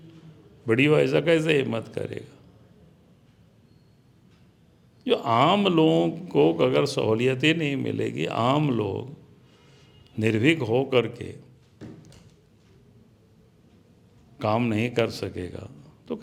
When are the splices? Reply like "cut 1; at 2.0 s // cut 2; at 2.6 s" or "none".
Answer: none